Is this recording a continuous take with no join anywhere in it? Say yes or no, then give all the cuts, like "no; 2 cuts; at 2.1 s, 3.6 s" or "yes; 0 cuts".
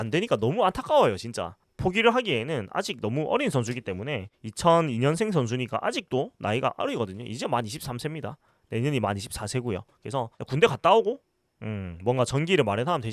no; 1 cut; at 1.6 s